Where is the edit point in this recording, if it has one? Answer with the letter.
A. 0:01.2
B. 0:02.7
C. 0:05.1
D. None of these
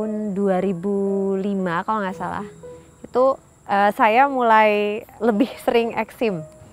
C